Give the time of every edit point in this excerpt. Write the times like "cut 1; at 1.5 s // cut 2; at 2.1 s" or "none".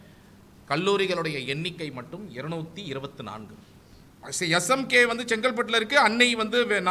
cut 1; at 4.2 s